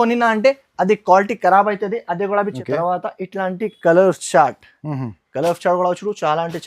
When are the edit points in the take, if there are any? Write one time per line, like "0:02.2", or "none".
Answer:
0:02.6